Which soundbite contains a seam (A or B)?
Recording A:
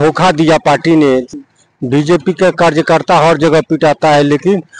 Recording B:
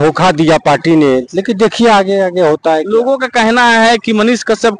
A